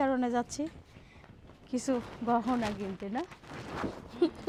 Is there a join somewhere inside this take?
no; 0 cuts

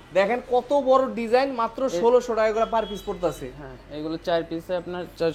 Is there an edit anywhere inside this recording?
no; 0 cuts

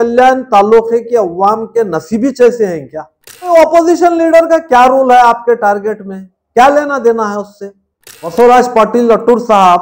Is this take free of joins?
no; 2 cuts; at 3.5 s, 8.3 s

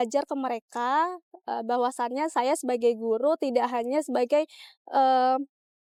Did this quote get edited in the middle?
no; 0 cuts

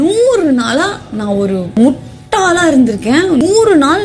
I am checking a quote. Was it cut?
yes; 1 cut; at 1.8 s

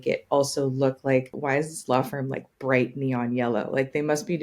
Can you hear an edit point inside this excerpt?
yes; 1 cut; at 1.4 s

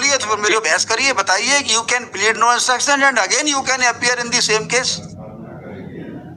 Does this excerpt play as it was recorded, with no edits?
yes; 0 cuts

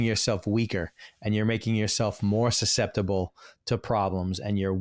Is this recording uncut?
yes; 0 cuts

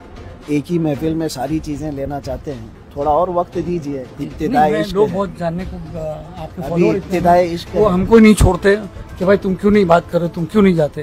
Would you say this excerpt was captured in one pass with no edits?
yes; 0 cuts

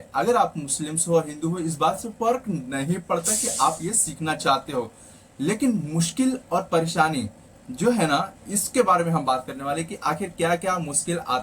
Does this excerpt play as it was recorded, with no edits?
yes; 0 cuts

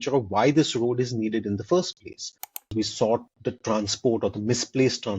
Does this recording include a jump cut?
yes; 2 cuts; at 2.6 s, 3.3 s

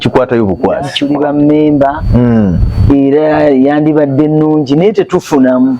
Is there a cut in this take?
yes; 1 cut; at 0.9 s

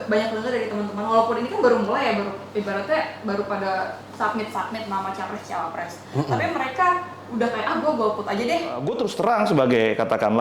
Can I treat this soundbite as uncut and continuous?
no; 1 cut; at 8.9 s

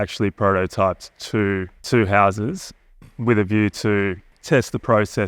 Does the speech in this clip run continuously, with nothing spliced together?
no; 2 cuts; at 1.8 s, 4.3 s

